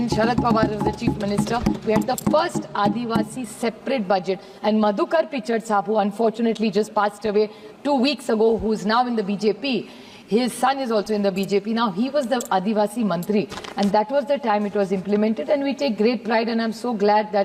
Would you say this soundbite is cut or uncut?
uncut